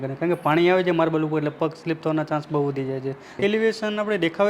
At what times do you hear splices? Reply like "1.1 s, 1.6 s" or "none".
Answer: 3.3 s

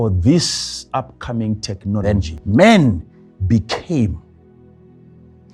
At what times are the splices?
2.0 s

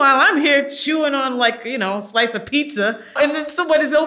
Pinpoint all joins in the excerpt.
3.1 s

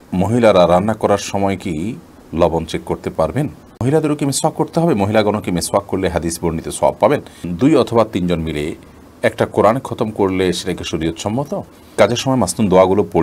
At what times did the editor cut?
3.8 s, 7.5 s, 11.9 s

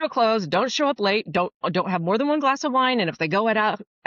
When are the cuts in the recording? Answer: none

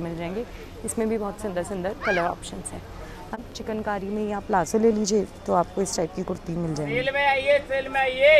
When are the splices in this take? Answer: 3.4 s

